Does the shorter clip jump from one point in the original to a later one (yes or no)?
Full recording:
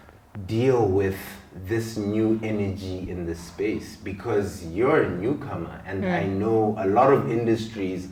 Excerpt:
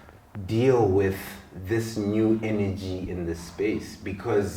no